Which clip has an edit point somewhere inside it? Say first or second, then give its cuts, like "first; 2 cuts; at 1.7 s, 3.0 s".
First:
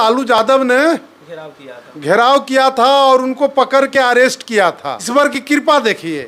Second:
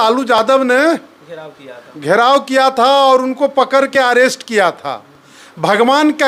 first; 1 cut; at 4.9 s